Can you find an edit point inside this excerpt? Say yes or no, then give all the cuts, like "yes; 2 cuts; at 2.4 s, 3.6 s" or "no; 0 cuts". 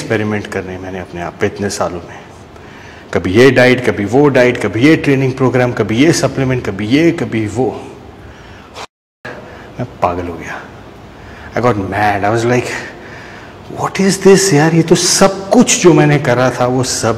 no; 0 cuts